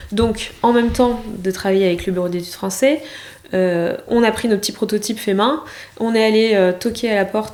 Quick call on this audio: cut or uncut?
uncut